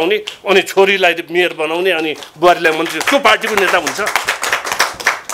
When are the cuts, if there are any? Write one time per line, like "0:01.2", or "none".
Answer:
none